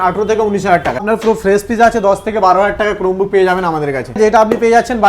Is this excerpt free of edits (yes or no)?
no